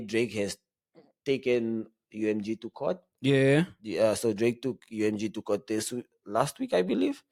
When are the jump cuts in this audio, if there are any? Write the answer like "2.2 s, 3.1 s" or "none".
none